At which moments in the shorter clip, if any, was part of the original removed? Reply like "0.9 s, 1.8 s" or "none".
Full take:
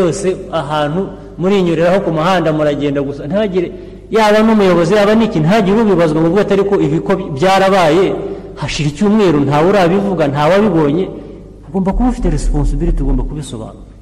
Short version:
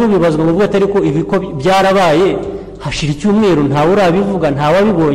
none